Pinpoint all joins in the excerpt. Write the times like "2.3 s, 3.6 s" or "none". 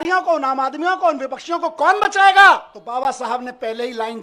2.8 s